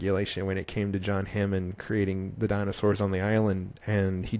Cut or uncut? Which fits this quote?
uncut